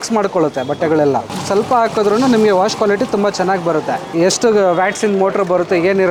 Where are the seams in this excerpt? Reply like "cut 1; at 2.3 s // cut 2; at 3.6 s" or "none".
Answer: none

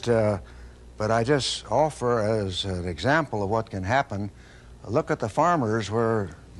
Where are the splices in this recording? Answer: cut 1; at 1.2 s

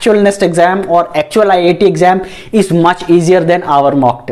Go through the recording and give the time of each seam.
none

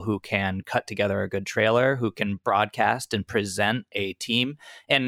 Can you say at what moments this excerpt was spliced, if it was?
cut 1; at 3.9 s

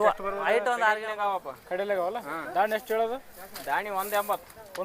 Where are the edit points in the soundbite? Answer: cut 1; at 1.1 s

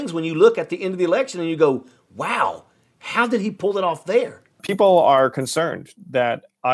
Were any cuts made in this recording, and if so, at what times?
cut 1; at 4.7 s

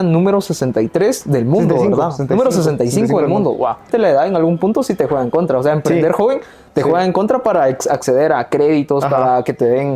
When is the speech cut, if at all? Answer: cut 1; at 3.9 s

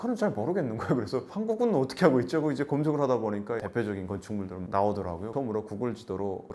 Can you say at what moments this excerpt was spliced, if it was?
cut 1; at 5.3 s

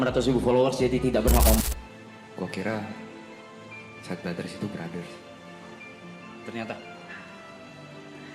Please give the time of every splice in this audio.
cut 1; at 1.6 s

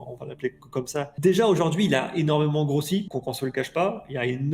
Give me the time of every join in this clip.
cut 1; at 1.1 s // cut 2; at 3.1 s

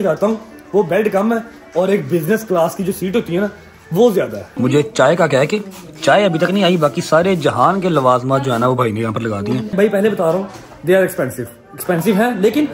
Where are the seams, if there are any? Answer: cut 1; at 4.4 s // cut 2; at 9.7 s

